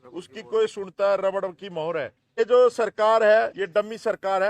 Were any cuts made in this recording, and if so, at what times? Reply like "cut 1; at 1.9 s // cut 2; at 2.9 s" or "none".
cut 1; at 2.4 s // cut 2; at 3.6 s